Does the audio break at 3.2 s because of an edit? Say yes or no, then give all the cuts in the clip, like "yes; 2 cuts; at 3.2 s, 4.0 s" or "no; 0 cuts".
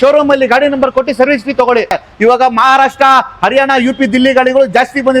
no; 1 cut; at 2.0 s